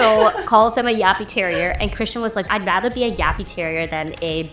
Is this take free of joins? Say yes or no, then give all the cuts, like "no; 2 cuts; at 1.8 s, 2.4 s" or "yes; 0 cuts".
no; 1 cut; at 2.5 s